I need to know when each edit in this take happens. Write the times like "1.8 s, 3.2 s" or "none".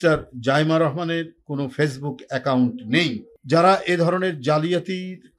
3.3 s

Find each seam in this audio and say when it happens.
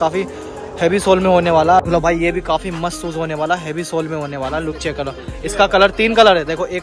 1.8 s

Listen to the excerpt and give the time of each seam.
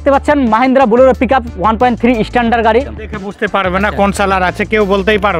3.0 s

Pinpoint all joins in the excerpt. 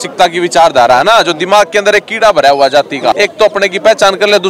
3.2 s

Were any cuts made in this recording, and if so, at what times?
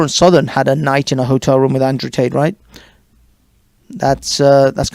none

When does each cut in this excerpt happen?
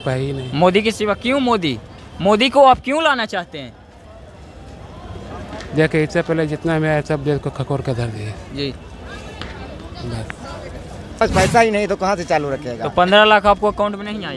11.2 s

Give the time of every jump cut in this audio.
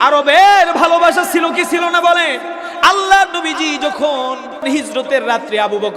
4.6 s

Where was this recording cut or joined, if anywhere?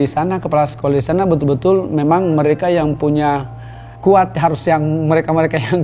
none

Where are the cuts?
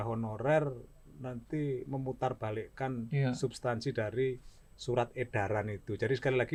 none

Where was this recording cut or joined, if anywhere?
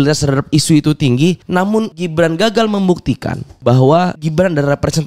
1.8 s, 3.5 s, 4.2 s

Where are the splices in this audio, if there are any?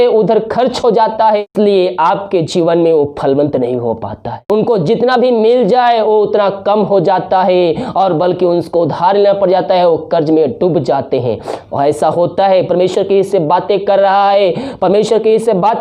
1.4 s, 4.4 s

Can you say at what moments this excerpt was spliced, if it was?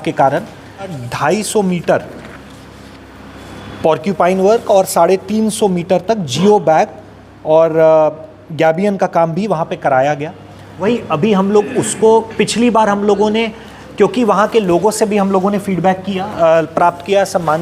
1.0 s, 10.8 s

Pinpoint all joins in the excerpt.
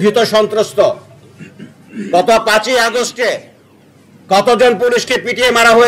none

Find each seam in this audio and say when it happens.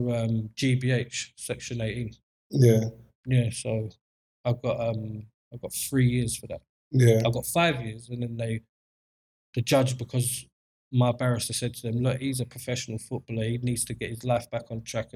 none

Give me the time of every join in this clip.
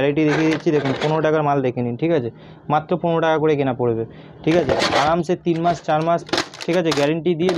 none

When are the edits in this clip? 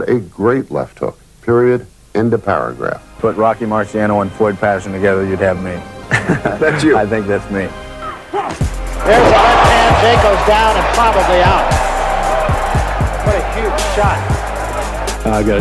none

